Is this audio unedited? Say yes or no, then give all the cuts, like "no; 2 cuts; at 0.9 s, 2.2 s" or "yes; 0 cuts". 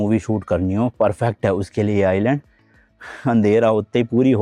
yes; 0 cuts